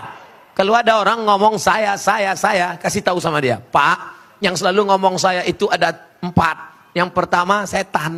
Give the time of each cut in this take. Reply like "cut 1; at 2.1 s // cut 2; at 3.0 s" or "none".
none